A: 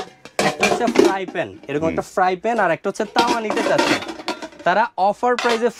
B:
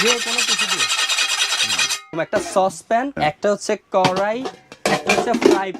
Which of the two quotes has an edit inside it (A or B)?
B